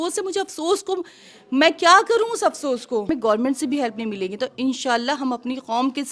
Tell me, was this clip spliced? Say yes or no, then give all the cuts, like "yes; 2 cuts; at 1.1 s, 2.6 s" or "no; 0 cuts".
yes; 1 cut; at 3.1 s